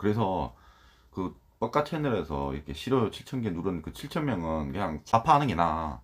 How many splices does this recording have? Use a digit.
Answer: 1